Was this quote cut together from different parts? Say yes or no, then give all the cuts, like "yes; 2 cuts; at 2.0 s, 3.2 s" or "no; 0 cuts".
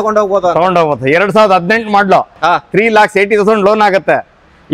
no; 0 cuts